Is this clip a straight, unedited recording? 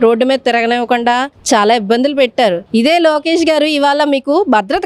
yes; 0 cuts

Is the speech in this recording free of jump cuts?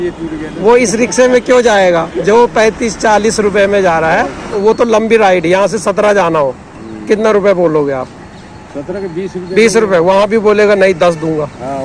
no; 1 cut; at 4.6 s

